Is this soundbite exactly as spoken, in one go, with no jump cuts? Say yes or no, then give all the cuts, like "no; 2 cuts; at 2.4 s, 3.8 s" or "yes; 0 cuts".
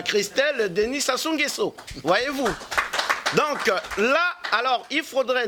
yes; 0 cuts